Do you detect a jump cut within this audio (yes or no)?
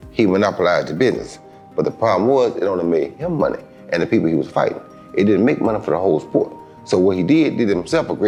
no